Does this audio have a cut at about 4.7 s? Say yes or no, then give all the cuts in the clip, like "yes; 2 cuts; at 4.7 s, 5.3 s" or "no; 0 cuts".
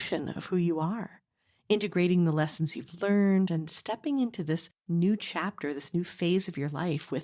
yes; 1 cut; at 4.7 s